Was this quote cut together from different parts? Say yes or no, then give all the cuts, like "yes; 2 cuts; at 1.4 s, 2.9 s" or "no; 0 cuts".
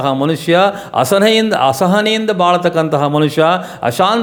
no; 0 cuts